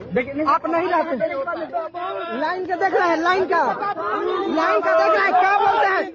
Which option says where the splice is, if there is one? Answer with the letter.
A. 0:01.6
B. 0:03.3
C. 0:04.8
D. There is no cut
A